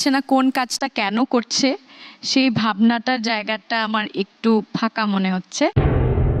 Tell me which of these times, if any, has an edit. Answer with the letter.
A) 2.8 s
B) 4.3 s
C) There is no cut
C